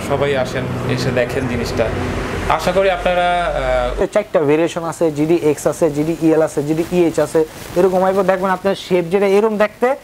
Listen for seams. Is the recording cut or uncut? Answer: cut